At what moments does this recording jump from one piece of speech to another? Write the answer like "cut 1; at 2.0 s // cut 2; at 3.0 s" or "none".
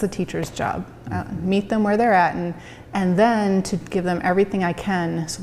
none